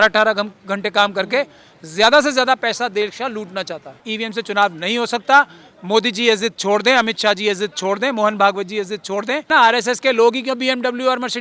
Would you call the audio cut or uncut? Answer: cut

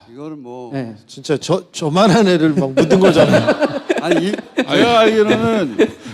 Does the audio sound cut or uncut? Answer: cut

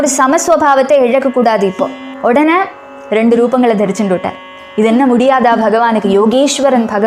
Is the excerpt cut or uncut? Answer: cut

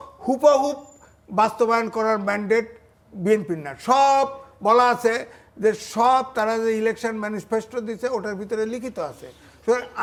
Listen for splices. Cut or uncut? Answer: uncut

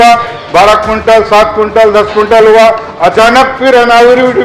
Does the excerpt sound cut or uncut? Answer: uncut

